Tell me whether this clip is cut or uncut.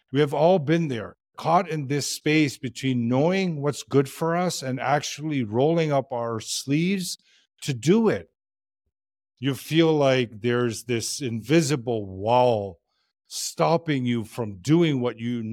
uncut